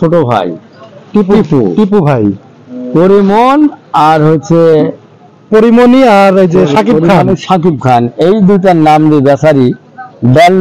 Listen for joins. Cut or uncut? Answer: uncut